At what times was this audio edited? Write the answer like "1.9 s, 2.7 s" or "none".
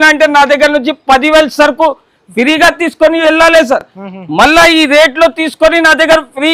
none